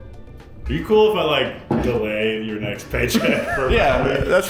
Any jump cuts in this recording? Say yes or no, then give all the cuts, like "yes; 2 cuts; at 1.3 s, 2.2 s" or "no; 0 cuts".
no; 0 cuts